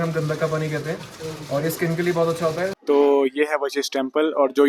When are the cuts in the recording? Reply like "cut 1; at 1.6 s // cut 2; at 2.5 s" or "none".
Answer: cut 1; at 2.8 s